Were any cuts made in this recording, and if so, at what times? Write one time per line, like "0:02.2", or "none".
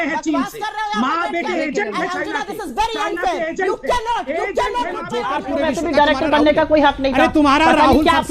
0:05.2